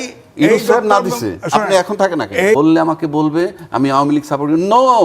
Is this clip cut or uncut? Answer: cut